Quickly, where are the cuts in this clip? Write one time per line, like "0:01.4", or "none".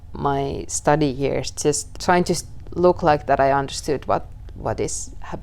0:01.9